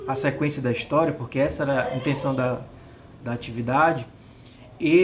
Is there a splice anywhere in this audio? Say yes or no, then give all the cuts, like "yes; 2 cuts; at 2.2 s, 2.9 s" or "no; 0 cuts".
no; 0 cuts